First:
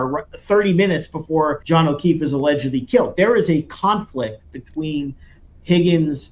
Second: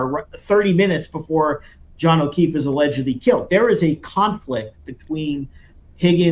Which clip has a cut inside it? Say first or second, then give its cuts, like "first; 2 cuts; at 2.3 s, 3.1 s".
first; 1 cut; at 1.6 s